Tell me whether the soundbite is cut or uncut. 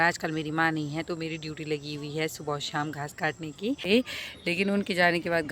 cut